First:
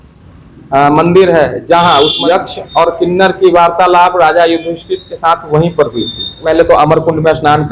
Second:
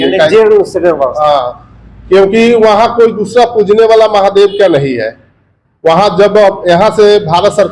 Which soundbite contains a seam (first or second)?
first